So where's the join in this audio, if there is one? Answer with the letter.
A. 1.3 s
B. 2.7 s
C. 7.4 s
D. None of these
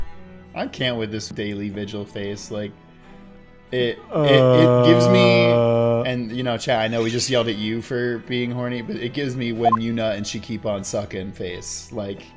A